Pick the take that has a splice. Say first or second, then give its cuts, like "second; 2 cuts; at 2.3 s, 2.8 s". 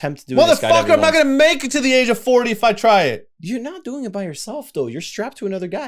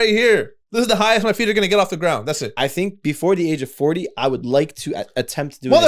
second; 1 cut; at 2.4 s